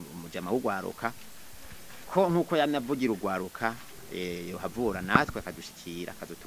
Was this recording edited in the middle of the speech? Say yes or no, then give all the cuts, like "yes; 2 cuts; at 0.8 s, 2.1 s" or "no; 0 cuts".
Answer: no; 0 cuts